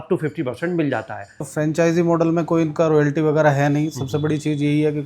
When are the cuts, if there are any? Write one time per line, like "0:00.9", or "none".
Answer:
0:01.5